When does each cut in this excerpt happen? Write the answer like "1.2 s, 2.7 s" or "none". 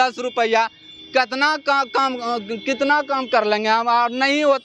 none